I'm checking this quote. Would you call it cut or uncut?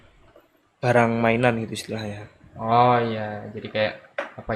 uncut